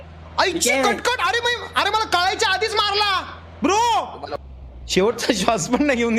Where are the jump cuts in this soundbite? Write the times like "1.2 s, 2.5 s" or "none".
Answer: 4.4 s